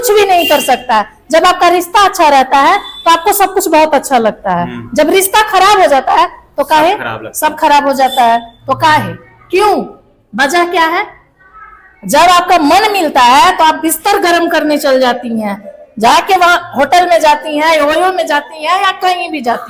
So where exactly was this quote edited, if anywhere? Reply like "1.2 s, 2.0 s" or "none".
none

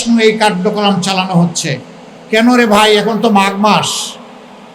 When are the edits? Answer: none

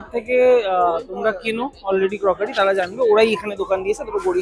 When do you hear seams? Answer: none

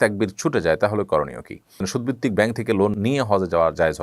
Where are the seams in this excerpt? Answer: 1.9 s, 2.9 s

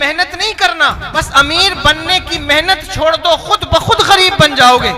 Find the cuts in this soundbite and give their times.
1.0 s

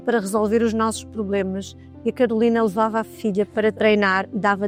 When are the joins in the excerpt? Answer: none

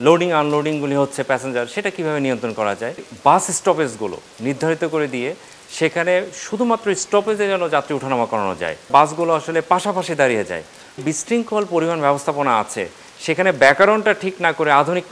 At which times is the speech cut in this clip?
3.1 s, 8.9 s, 11.0 s

